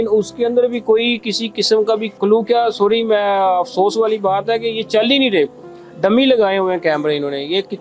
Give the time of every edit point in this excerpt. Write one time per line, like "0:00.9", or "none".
0:02.1